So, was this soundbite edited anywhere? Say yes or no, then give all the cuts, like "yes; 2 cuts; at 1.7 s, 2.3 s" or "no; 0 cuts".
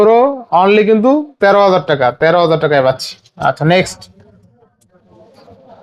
no; 0 cuts